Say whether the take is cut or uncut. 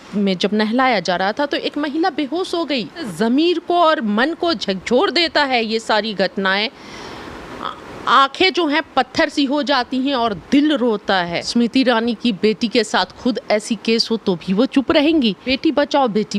cut